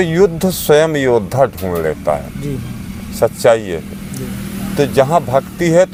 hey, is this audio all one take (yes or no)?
yes